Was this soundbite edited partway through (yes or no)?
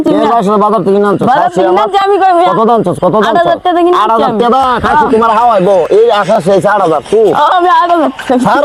no